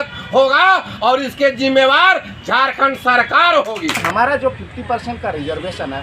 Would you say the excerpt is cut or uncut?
cut